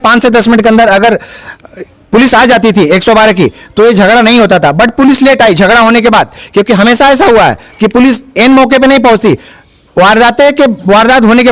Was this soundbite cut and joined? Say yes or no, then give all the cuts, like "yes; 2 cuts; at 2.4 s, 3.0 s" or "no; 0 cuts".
no; 0 cuts